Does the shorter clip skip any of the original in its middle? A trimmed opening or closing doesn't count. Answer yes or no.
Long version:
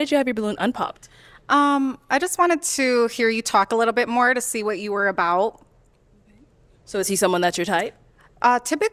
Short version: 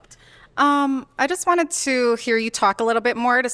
no